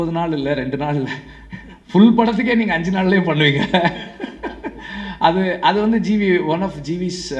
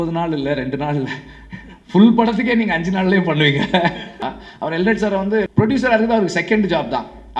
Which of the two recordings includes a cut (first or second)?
second